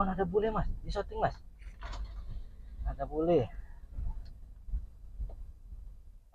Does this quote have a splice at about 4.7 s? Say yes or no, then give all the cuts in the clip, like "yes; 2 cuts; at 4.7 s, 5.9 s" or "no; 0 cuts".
no; 0 cuts